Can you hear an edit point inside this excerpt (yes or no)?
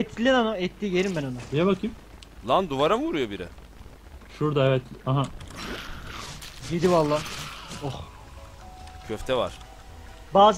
yes